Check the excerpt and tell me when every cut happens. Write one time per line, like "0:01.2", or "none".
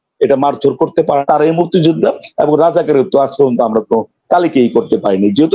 0:01.2